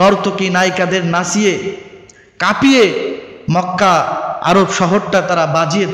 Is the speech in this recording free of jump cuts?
yes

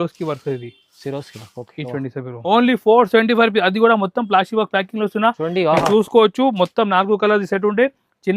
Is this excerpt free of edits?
no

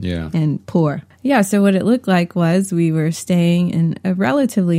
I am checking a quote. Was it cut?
yes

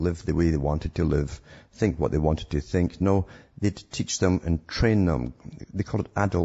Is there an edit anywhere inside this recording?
no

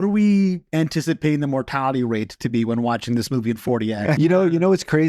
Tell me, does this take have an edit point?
yes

